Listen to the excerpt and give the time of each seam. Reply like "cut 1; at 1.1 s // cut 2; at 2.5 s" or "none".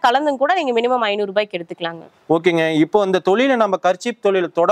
none